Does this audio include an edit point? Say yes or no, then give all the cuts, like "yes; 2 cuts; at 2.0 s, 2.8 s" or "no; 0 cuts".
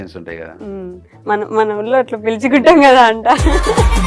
no; 0 cuts